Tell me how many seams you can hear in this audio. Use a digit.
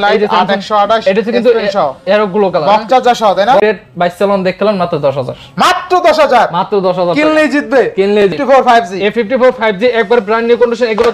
2